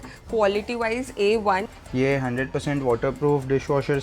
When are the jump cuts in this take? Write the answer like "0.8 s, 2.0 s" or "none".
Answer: 1.7 s

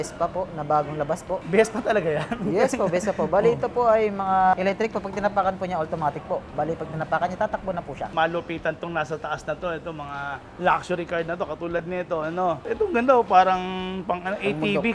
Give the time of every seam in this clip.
1.4 s, 4.5 s, 8.1 s, 12.6 s

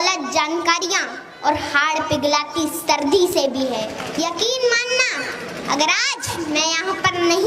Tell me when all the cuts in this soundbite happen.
4.0 s

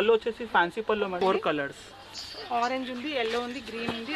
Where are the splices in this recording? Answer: 1.2 s

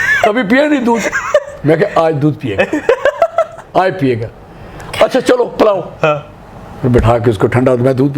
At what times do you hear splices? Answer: none

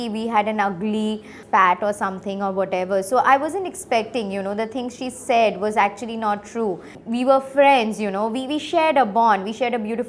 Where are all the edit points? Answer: 7.0 s

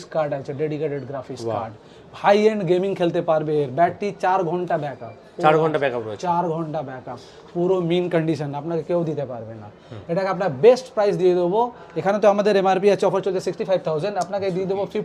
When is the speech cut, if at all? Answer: none

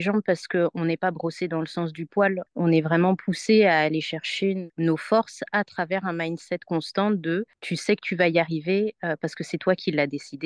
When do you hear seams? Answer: none

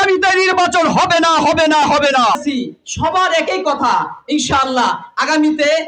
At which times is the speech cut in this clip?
2.4 s

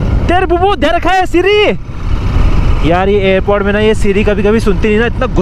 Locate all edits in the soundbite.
none

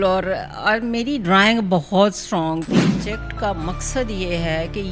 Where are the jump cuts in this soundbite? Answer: 3.1 s

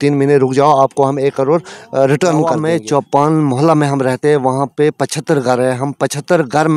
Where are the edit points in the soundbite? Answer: 2.6 s

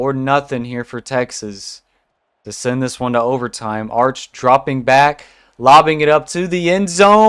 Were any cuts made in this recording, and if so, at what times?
none

